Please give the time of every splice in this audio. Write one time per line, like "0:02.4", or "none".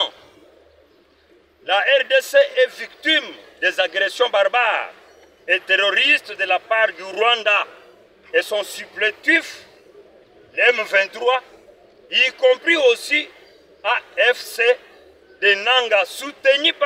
none